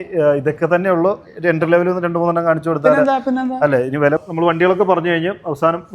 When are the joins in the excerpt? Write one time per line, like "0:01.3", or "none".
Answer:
0:04.2